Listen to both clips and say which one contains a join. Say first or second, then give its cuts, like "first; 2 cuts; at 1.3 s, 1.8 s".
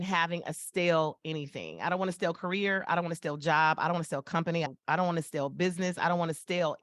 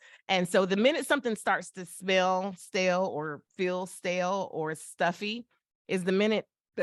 first; 1 cut; at 4.7 s